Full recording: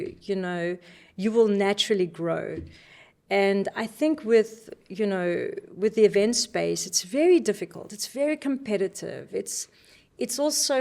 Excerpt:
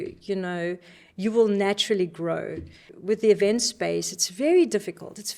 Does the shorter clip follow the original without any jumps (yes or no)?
no